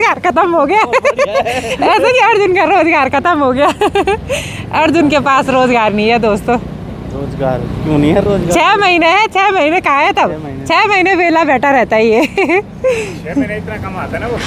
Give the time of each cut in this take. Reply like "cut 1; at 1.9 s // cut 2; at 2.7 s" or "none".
none